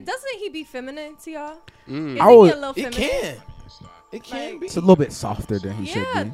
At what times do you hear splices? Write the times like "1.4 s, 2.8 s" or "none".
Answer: none

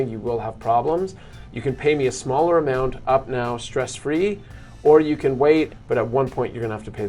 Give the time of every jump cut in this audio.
5.8 s

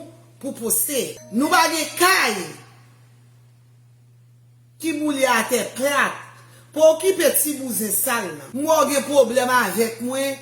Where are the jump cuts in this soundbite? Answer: 1.2 s, 8.4 s

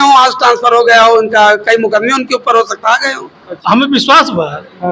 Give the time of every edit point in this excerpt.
3.5 s

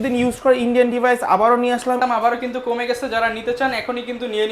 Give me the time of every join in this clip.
2.0 s

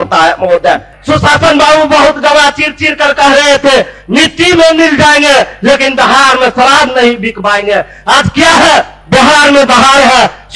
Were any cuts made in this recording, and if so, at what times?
0.9 s, 8.9 s

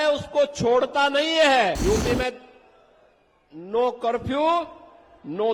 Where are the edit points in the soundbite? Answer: 1.8 s

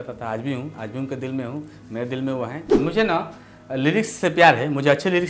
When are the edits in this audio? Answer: 2.7 s

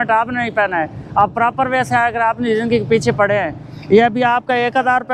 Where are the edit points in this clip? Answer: none

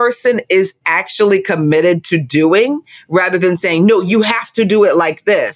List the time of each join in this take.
none

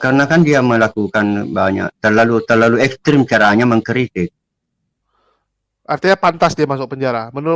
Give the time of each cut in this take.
none

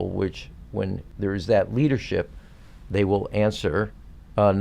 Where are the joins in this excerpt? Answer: 1.1 s

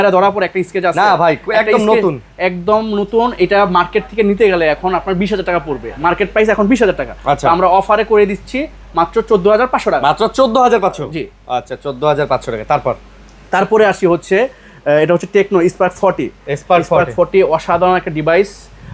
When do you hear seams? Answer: none

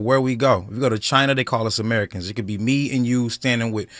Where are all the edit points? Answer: 0.9 s

